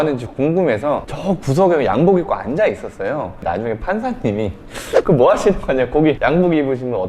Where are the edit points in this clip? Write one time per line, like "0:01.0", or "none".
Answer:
none